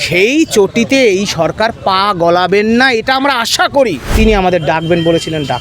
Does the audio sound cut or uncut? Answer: cut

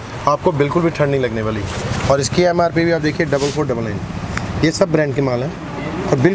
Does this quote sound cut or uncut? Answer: uncut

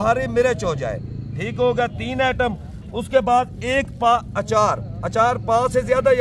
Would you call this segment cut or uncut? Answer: uncut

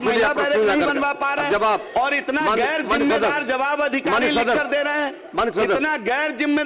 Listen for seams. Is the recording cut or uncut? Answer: uncut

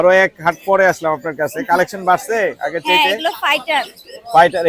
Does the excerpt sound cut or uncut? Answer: uncut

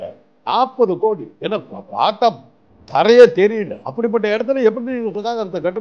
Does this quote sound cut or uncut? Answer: cut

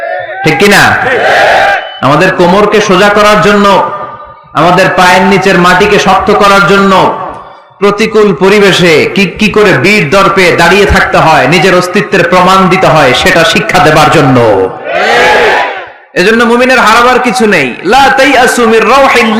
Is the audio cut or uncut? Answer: uncut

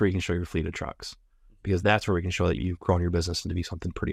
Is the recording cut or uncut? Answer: uncut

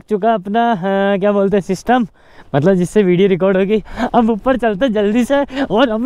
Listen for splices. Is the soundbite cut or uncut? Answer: uncut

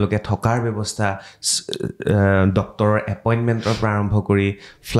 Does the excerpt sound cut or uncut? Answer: uncut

